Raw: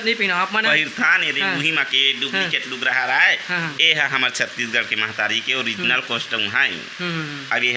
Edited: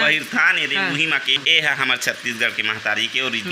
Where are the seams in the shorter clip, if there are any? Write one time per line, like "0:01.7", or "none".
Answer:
0:01.4